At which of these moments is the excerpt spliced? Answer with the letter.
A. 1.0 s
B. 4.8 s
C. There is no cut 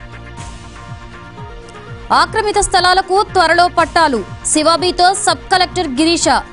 A